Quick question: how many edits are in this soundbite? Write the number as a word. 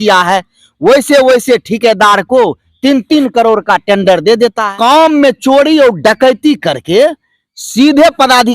one